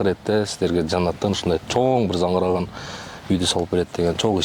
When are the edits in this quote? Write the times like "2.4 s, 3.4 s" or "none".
none